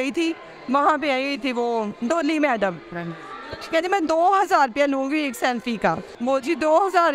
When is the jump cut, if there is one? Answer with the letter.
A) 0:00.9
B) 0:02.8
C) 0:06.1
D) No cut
C